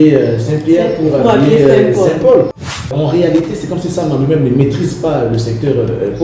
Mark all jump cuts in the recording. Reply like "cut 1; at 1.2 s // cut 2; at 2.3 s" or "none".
cut 1; at 2.9 s